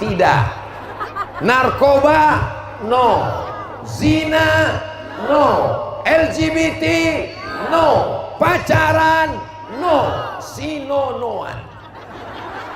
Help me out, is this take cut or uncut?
uncut